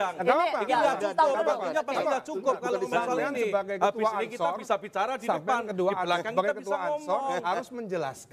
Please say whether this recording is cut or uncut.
uncut